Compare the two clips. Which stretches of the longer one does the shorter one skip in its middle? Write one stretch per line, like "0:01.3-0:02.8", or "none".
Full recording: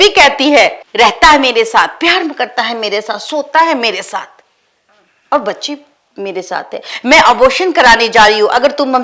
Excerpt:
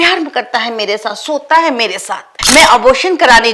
0:04.4-0:06.9